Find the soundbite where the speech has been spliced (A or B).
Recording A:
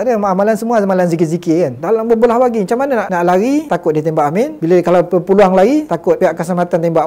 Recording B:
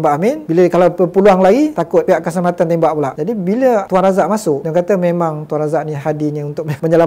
A